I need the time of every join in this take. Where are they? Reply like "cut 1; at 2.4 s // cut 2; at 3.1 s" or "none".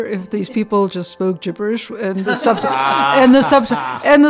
none